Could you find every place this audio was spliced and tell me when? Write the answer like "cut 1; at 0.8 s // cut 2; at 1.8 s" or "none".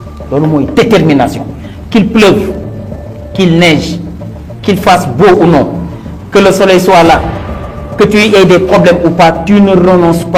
none

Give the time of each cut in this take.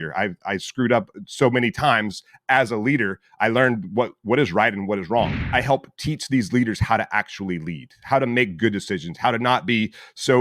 cut 1; at 5.5 s

